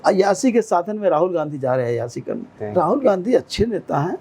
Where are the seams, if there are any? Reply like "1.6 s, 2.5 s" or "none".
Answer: 2.6 s